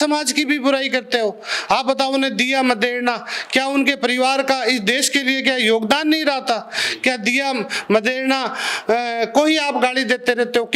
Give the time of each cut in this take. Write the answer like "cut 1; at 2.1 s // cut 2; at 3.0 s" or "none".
none